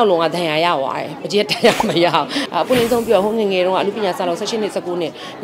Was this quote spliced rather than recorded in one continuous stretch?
yes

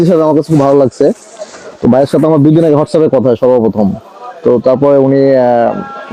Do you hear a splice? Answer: no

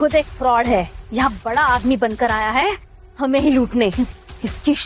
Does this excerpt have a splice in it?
no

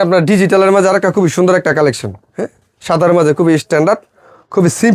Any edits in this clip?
no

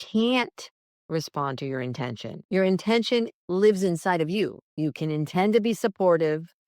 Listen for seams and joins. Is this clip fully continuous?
no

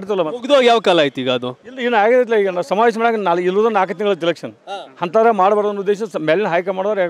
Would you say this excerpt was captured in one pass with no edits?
yes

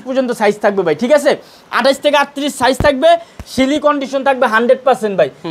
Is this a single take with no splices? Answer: yes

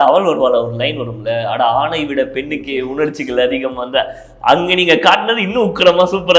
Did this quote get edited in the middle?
no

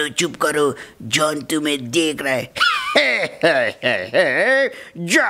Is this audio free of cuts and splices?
yes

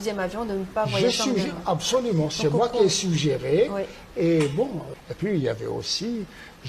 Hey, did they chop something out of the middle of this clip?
yes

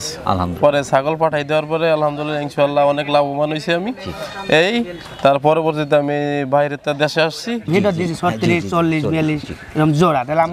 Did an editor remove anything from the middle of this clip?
yes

